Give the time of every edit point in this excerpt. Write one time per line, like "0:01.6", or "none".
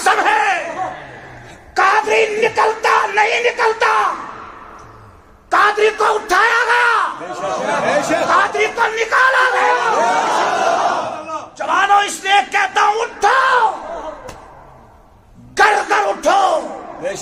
none